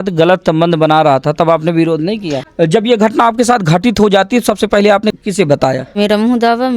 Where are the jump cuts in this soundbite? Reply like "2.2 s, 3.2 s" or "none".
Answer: 2.4 s, 6.0 s